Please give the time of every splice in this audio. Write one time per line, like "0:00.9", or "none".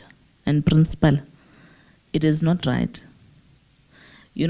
none